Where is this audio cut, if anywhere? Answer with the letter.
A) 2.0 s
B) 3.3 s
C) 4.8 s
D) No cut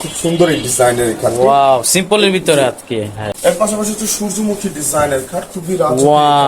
B